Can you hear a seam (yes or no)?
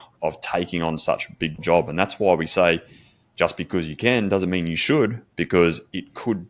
yes